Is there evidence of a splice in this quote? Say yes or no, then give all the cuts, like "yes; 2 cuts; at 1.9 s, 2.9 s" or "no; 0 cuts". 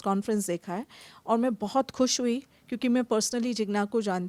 no; 0 cuts